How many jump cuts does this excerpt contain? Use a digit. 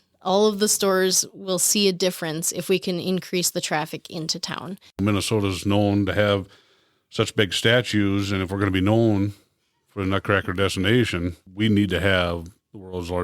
1